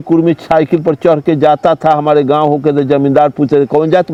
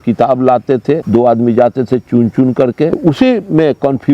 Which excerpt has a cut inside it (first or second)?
second